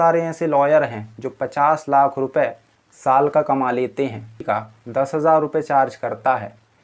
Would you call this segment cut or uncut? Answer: cut